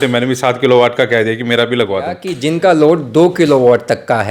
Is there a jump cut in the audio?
yes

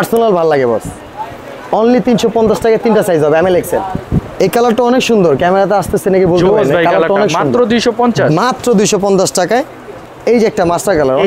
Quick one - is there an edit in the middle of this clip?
yes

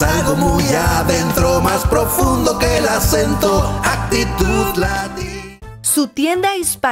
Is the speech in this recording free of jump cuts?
no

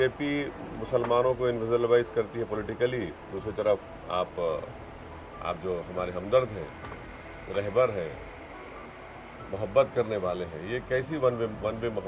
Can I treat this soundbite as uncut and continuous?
yes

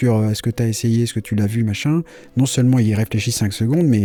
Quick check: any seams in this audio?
no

